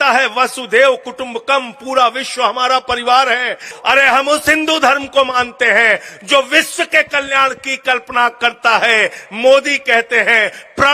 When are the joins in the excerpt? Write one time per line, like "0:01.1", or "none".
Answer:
0:03.7